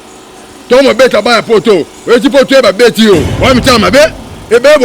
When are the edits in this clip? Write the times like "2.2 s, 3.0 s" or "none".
3.3 s